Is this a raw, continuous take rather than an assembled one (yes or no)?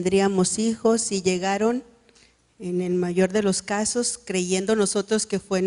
yes